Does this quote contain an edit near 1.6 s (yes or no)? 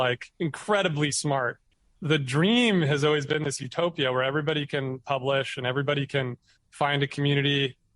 yes